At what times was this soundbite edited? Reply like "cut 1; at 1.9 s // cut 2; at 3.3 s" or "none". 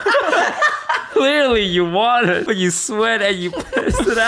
cut 1; at 1.1 s // cut 2; at 2.4 s